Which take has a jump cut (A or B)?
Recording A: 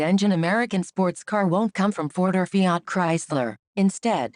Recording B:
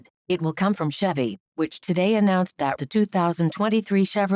A